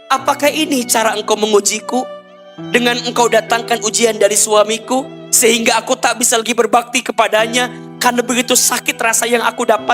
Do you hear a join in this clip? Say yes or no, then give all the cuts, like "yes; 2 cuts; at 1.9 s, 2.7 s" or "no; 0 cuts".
no; 0 cuts